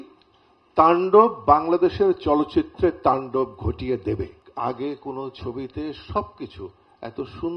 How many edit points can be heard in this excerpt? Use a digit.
1